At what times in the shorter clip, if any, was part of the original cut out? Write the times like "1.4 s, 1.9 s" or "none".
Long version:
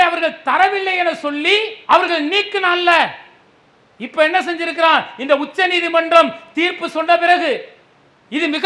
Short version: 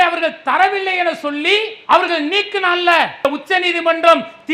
3.2 s